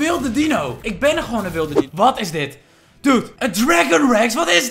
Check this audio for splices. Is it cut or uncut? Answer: cut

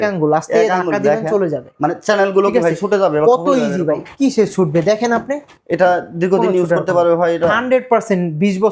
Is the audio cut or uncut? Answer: uncut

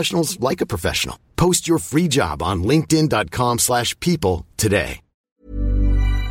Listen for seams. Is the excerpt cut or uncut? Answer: cut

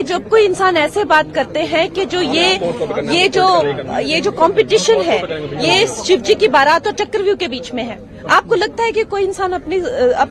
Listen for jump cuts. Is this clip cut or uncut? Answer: cut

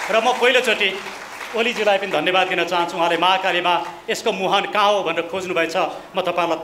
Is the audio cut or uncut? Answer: uncut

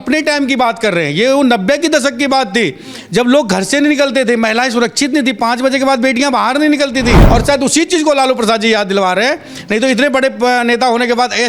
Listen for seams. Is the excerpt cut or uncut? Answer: cut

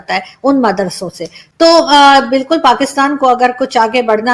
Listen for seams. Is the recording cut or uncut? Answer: uncut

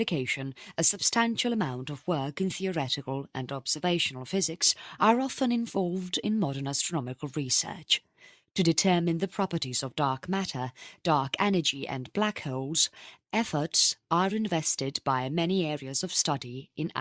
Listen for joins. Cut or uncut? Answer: cut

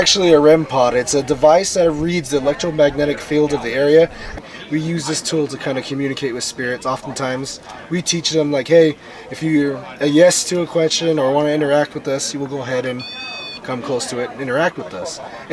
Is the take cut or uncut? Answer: cut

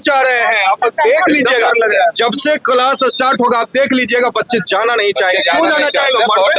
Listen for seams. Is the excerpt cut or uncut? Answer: uncut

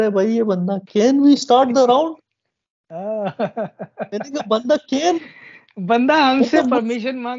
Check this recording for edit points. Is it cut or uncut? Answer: uncut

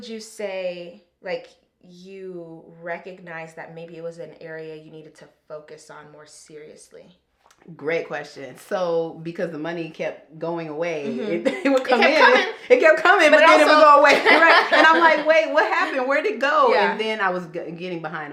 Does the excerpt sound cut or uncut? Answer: uncut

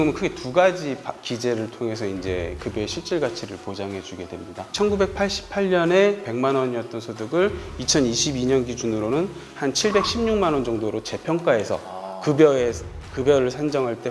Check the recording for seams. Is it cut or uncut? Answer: cut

